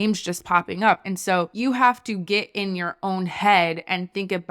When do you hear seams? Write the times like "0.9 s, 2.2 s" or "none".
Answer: 1.0 s